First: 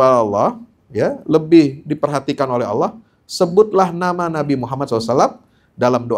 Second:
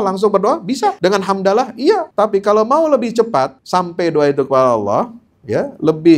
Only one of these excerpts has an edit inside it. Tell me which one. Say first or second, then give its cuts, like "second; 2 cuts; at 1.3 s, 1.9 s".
second; 3 cuts; at 1.0 s, 2.1 s, 3.6 s